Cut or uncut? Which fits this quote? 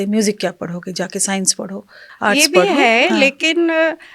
cut